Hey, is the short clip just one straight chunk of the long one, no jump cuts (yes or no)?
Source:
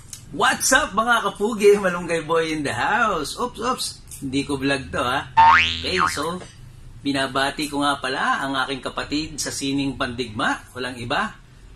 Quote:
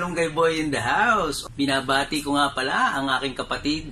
no